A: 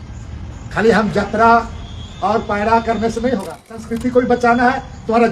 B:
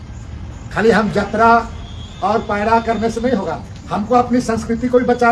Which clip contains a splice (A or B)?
A